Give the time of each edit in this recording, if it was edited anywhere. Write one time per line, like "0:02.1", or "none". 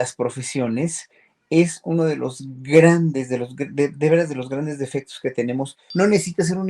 0:05.8